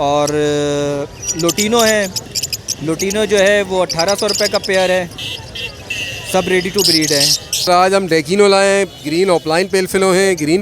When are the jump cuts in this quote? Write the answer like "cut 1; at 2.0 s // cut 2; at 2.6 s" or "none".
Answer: cut 1; at 7.7 s